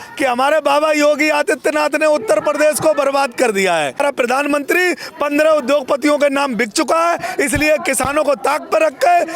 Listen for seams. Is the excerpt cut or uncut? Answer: cut